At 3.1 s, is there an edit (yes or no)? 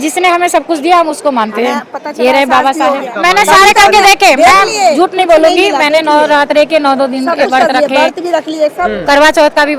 yes